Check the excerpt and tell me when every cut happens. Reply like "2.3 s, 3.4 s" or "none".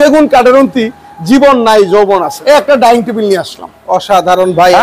2.3 s